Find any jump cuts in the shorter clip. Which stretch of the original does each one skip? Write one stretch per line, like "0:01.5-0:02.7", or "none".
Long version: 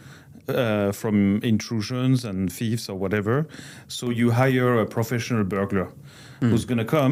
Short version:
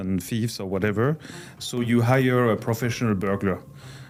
none